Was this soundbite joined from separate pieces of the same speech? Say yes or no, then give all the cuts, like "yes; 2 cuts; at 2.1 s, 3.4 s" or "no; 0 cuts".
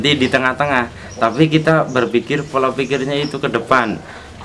no; 0 cuts